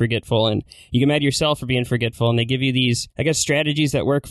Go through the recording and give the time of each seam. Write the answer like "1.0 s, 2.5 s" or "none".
3.1 s